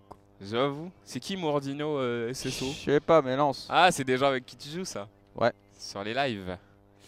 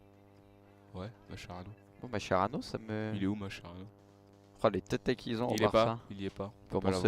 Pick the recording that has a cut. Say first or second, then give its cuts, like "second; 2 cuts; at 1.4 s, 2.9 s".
second; 1 cut; at 4.5 s